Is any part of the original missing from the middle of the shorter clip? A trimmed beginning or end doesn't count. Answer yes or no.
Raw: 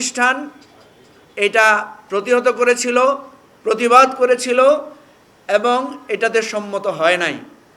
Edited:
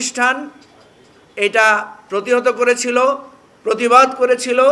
no